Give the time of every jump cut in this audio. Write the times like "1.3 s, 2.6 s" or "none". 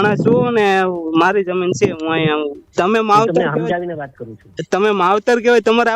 2.6 s

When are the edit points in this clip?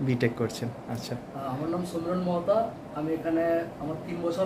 none

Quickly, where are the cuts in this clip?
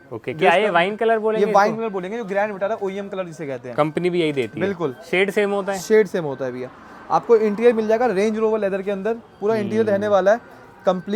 none

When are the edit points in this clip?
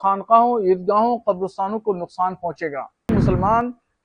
3.1 s

